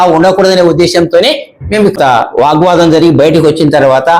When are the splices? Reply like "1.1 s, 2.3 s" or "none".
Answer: 2.0 s